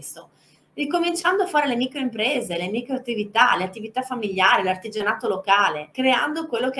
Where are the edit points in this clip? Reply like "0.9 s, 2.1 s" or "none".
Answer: 5.8 s